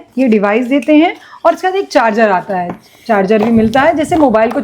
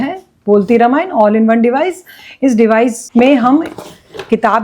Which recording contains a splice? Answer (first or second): second